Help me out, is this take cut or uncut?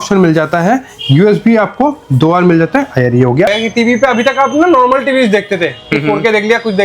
cut